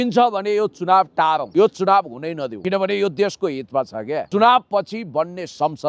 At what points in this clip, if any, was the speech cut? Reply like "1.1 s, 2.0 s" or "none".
1.5 s, 2.5 s, 4.2 s